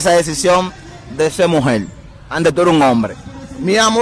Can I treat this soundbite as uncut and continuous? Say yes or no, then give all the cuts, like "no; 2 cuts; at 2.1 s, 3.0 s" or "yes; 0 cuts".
yes; 0 cuts